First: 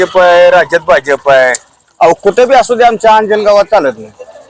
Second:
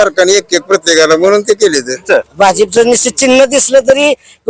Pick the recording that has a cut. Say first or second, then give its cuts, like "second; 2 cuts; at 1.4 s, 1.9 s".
second; 1 cut; at 2.1 s